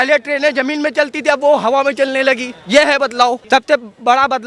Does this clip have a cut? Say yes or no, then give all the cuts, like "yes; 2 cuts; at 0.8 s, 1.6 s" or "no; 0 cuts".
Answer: yes; 1 cut; at 3.4 s